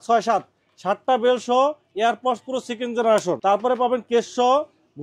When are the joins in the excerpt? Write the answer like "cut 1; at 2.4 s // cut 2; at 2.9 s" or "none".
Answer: none